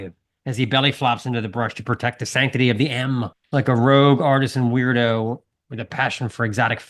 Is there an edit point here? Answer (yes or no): yes